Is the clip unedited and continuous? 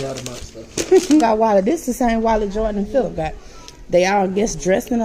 no; 1 cut; at 1.2 s

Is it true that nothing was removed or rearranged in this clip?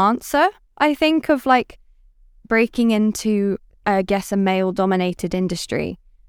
yes; 0 cuts

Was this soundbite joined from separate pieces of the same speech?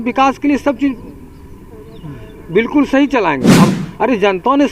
yes; 1 cut; at 3.7 s

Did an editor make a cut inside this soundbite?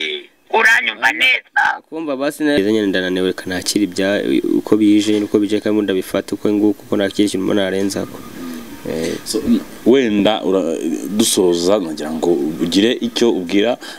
yes; 1 cut; at 2.6 s

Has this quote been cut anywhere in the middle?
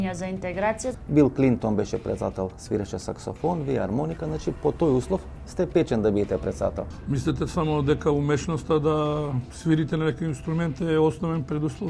yes; 3 cuts; at 0.9 s, 6.9 s, 9.5 s

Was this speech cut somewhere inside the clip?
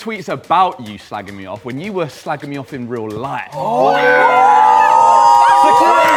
no; 0 cuts

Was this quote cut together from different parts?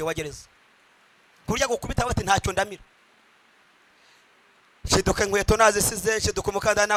no; 0 cuts

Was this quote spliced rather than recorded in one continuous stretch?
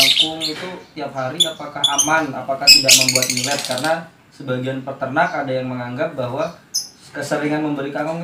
no; 0 cuts

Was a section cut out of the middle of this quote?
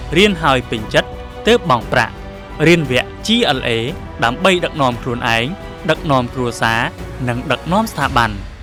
no; 0 cuts

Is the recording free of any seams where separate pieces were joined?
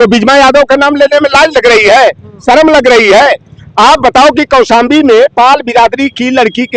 yes; 0 cuts

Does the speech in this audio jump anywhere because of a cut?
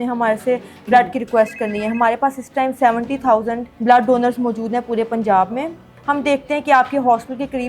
yes; 2 cuts; at 3.6 s, 5.9 s

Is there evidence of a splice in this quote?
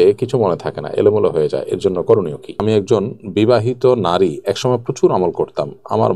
yes; 1 cut; at 2.6 s

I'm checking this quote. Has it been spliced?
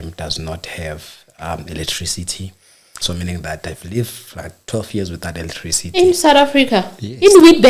no; 0 cuts

